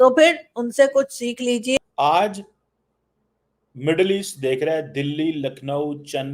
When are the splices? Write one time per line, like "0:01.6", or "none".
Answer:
0:01.8